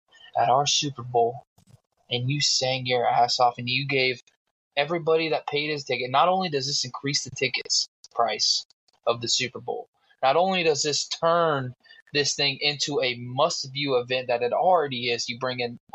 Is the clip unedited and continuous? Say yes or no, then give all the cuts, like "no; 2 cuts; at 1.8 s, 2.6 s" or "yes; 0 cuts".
yes; 0 cuts